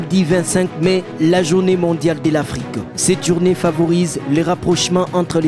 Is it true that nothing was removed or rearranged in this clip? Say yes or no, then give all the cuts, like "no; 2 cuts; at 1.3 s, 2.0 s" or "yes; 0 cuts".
yes; 0 cuts